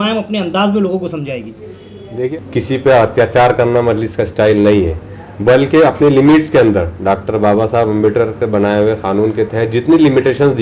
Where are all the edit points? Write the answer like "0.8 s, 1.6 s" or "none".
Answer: 2.3 s